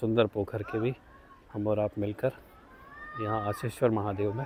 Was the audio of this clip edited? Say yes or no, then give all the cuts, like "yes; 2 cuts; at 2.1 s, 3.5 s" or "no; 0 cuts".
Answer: no; 0 cuts